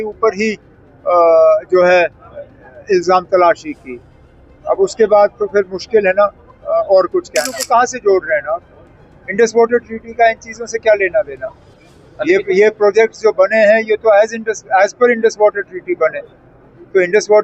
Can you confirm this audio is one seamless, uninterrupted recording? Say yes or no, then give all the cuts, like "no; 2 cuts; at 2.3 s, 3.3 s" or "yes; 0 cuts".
no; 1 cut; at 7.6 s